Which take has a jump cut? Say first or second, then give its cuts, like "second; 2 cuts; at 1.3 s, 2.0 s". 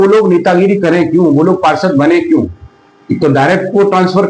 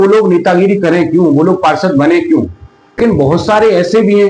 second; 1 cut; at 3.0 s